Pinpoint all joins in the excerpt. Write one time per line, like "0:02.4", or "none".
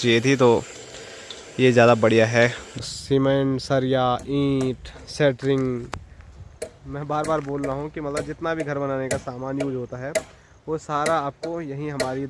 0:02.6